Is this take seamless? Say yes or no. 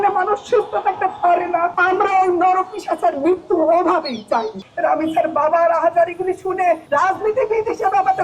no